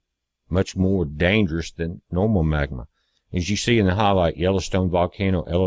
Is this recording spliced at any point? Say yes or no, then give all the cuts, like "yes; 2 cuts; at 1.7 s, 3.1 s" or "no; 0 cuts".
yes; 1 cut; at 2.9 s